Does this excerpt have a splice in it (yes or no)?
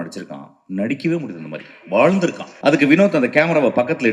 yes